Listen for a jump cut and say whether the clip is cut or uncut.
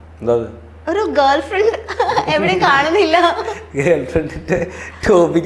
uncut